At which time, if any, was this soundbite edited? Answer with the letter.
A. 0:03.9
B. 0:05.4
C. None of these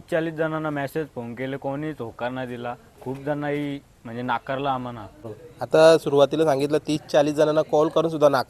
B